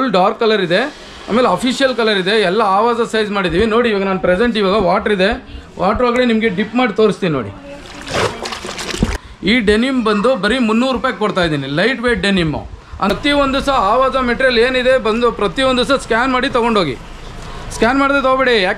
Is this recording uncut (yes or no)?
no